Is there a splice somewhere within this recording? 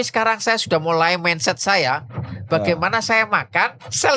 no; 0 cuts

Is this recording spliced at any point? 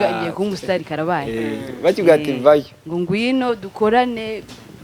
no; 0 cuts

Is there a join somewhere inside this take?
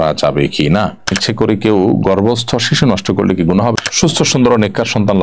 yes; 2 cuts; at 1.1 s, 3.7 s

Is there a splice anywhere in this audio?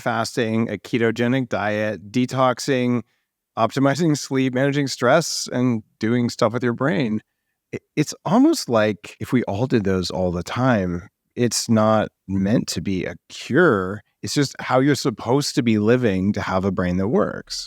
yes; 1 cut; at 9.1 s

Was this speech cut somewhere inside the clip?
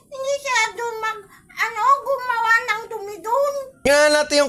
no; 0 cuts

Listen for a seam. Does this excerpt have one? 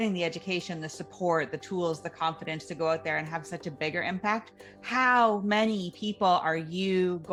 no; 0 cuts

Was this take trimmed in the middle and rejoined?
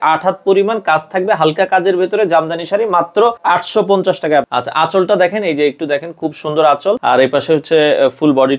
yes; 3 cuts; at 3.4 s, 4.5 s, 7.0 s

